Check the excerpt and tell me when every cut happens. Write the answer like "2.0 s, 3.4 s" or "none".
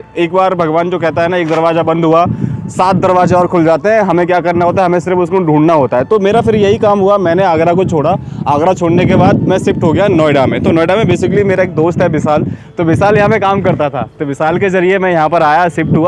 none